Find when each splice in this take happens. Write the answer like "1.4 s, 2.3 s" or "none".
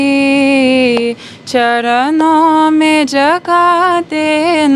none